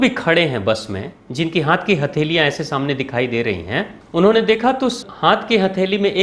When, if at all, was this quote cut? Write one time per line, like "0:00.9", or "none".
0:04.0
0:05.0

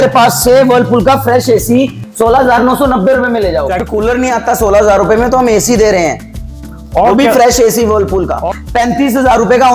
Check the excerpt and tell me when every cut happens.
0:03.8
0:08.4

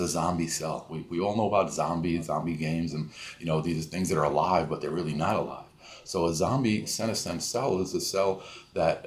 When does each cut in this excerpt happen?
none

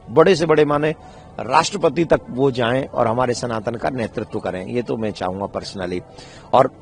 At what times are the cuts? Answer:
none

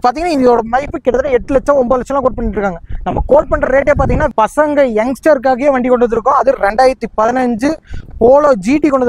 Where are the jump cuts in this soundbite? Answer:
0:04.3

